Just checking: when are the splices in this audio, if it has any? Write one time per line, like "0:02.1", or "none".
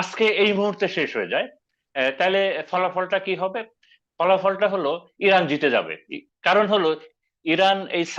none